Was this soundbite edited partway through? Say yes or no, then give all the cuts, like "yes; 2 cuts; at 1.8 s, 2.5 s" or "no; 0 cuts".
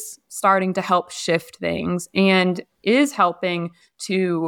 no; 0 cuts